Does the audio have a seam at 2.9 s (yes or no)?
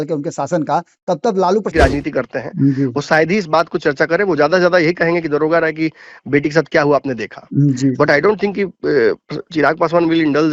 no